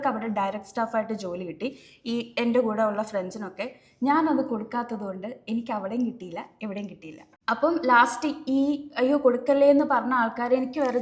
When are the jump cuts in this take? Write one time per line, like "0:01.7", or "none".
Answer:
none